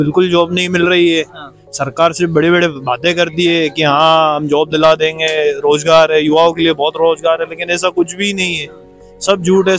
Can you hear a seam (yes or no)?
no